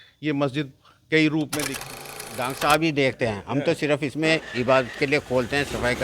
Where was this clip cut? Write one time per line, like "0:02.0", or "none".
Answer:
0:01.9